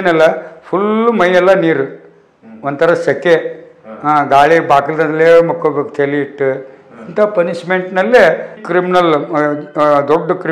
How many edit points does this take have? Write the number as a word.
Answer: one